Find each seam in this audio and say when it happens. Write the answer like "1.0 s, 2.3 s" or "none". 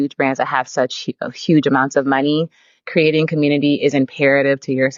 none